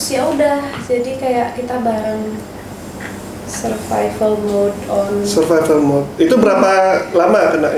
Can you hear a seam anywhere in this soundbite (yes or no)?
no